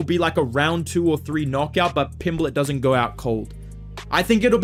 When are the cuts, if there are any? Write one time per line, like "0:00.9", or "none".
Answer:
none